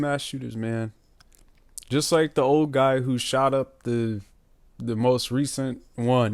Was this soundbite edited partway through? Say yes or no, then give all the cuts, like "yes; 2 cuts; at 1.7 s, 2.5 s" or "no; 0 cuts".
no; 0 cuts